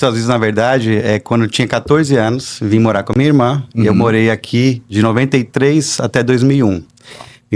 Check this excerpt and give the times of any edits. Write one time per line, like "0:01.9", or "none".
none